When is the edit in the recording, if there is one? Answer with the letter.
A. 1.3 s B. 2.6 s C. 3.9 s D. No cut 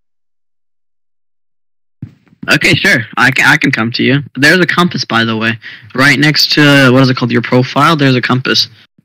B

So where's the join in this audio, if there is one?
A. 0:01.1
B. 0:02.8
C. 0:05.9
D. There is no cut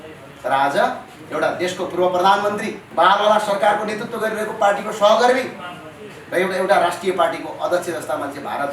B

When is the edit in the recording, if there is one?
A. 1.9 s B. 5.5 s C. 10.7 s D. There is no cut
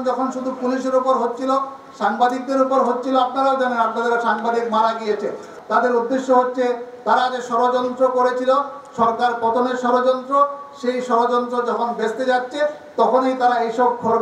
B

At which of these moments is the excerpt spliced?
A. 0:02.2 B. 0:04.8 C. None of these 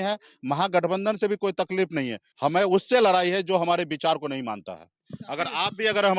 A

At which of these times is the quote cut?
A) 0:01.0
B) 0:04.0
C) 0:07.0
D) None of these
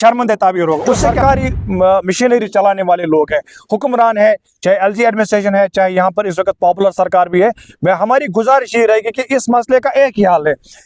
A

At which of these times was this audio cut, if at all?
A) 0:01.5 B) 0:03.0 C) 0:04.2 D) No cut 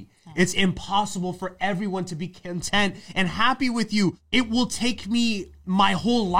C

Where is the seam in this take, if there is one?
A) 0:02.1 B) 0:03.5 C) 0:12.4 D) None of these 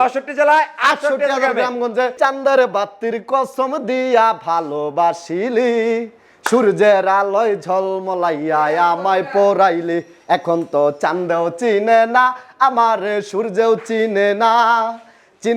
A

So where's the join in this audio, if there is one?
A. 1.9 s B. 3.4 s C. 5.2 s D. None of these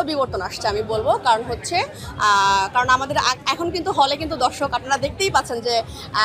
D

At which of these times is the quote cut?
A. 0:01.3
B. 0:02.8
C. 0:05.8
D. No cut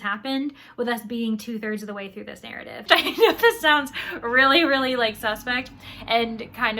B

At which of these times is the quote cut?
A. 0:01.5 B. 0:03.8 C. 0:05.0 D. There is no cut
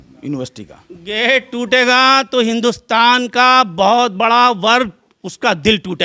D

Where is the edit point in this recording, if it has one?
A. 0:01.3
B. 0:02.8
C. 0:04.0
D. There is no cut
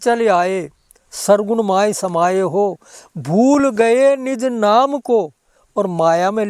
D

